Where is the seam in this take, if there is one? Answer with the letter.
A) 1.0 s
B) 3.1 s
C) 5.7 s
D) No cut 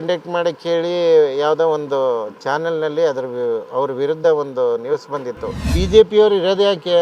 C